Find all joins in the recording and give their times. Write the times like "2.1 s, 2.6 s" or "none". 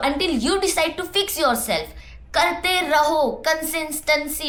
none